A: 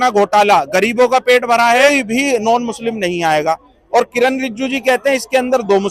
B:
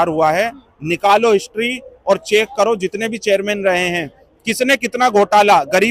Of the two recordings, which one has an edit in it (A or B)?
A